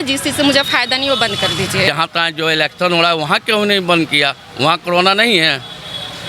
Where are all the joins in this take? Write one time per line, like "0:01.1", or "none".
0:01.9